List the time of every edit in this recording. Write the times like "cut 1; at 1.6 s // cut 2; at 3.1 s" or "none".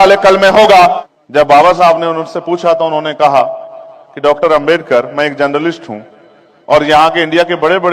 cut 1; at 1.0 s